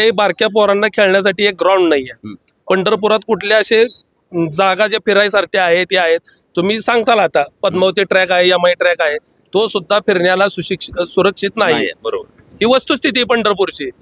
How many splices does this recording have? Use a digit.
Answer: 0